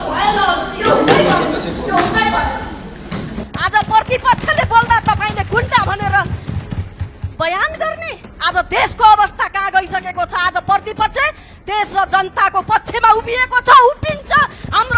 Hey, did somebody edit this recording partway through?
yes; 1 cut; at 3.4 s

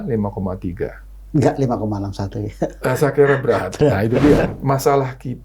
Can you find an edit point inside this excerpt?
yes; 1 cut; at 4.5 s

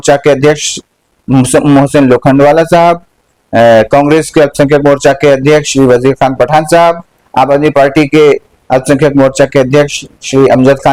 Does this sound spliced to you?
no; 0 cuts

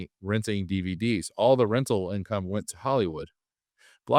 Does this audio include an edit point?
no; 0 cuts

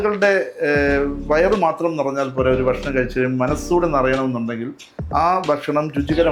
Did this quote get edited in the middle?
no; 0 cuts

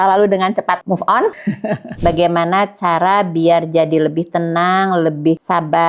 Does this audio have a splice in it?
yes; 1 cut; at 2.0 s

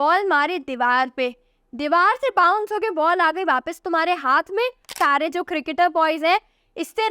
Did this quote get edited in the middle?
yes; 1 cut; at 5.0 s

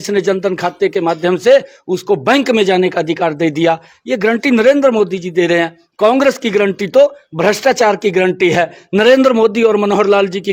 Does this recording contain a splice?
no; 0 cuts

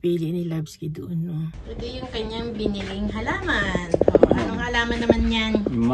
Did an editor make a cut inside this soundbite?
yes; 1 cut; at 1.7 s

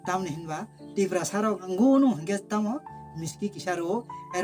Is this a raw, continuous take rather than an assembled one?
no; 1 cut; at 1.7 s

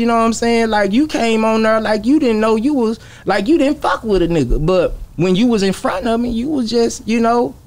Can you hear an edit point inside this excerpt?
no; 0 cuts

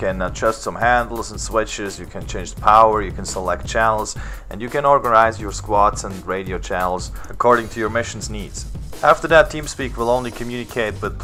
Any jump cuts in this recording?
no; 0 cuts

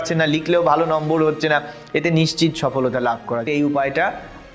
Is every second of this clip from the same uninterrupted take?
no; 1 cut; at 3.4 s

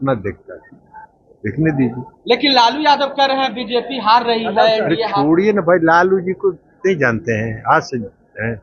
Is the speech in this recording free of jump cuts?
yes; 0 cuts

